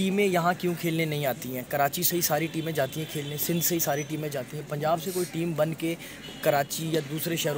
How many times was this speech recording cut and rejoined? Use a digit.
0